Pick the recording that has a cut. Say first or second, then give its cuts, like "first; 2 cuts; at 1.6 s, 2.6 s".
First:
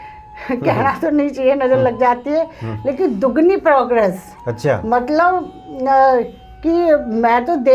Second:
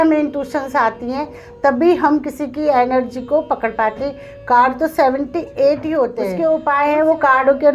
second; 1 cut; at 6.2 s